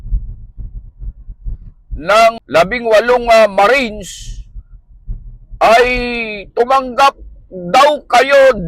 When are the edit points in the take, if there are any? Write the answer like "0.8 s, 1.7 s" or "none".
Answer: 2.4 s